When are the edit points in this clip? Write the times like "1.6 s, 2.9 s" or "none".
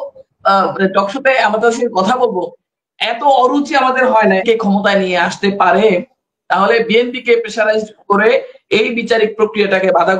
4.4 s